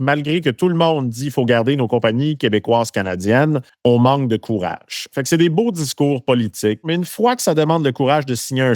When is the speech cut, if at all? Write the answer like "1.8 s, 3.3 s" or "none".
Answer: 3.7 s, 5.0 s, 6.8 s